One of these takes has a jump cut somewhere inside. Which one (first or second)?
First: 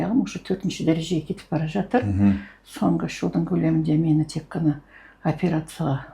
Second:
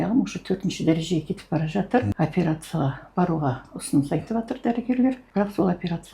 second